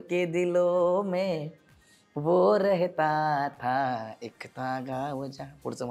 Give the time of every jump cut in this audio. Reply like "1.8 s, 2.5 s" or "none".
none